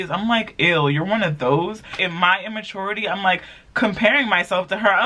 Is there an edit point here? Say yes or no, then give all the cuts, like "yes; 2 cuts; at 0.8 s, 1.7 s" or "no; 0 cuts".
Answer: yes; 1 cut; at 2.0 s